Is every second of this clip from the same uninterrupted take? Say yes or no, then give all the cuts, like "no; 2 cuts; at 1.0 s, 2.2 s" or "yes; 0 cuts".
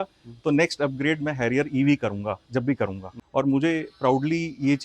no; 1 cut; at 3.1 s